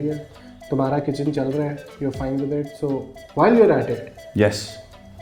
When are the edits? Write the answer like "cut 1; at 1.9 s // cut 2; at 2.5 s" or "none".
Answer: none

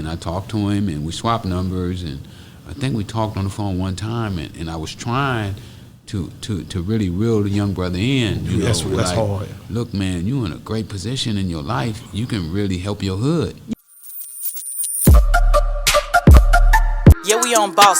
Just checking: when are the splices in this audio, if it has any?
cut 1; at 13.7 s

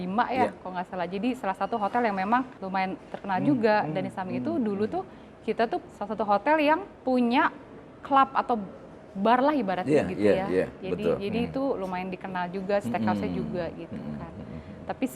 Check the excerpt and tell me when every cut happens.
cut 1; at 2.6 s // cut 2; at 5.9 s // cut 3; at 6.9 s

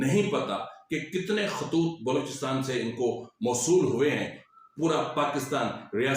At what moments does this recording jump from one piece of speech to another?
cut 1; at 4.4 s

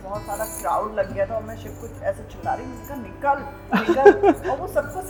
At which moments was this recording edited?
none

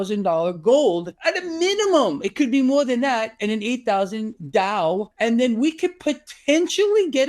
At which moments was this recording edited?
cut 1; at 1.1 s // cut 2; at 5.1 s

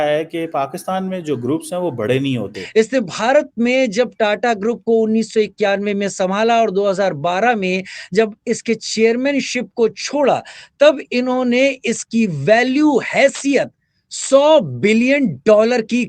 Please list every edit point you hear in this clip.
cut 1; at 2.6 s

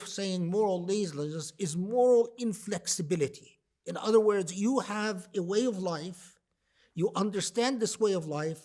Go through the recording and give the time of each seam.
none

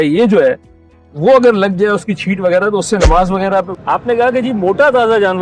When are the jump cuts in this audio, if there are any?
cut 1; at 3.7 s

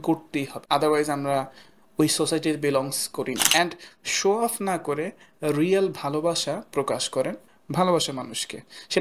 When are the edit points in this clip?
cut 1; at 3.4 s

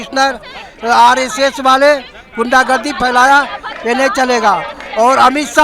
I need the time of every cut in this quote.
none

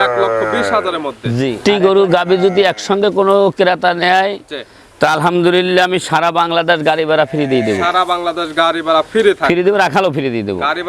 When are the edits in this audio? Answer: cut 1; at 1.5 s

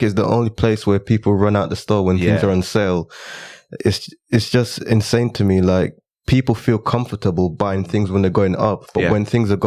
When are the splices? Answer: none

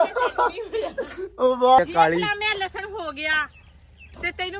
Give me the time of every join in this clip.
cut 1; at 1.8 s

